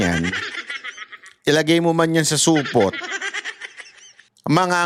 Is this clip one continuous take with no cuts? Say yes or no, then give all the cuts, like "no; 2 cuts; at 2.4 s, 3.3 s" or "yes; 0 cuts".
yes; 0 cuts